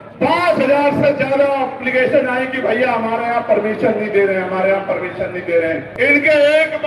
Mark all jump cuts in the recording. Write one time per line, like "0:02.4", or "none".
0:05.9